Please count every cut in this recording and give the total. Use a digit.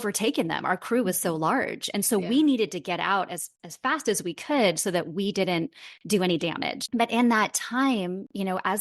1